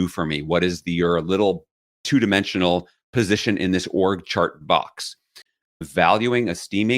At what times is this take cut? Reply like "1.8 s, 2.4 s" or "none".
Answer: 5.4 s

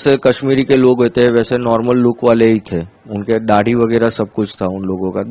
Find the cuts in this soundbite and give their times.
none

